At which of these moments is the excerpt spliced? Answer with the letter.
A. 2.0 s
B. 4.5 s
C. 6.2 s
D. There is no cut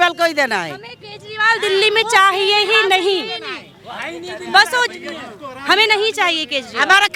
D